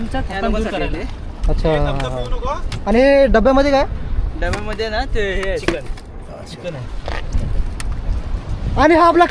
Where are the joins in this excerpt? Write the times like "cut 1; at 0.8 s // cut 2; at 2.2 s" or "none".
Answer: none